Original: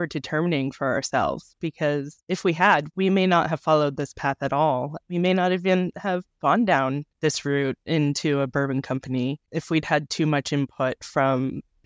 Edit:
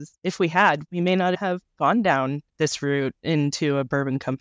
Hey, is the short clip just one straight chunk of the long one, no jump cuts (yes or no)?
no